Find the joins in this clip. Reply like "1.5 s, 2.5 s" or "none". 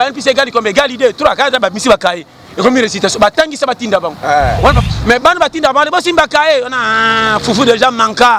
4.8 s